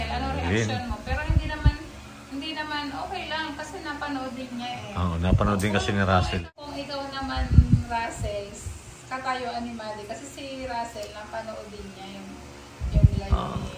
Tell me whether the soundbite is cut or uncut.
cut